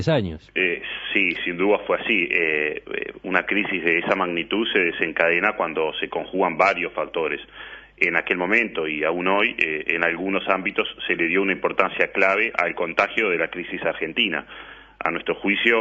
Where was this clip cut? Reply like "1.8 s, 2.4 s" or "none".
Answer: 12.3 s